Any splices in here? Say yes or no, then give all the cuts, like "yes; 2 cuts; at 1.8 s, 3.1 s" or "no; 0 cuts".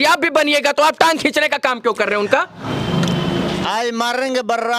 yes; 1 cut; at 3.6 s